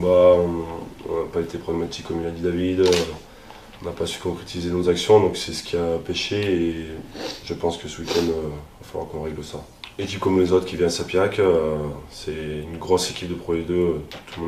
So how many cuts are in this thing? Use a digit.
1